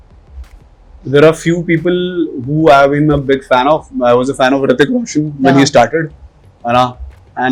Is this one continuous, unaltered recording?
yes; 0 cuts

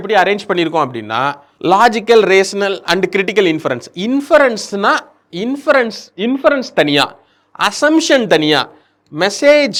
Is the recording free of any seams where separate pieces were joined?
yes; 0 cuts

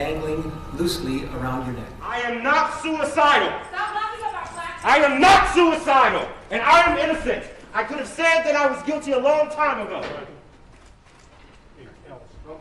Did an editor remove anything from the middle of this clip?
yes; 1 cut; at 1.9 s

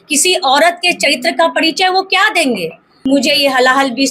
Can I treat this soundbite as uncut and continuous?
no; 1 cut; at 2.9 s

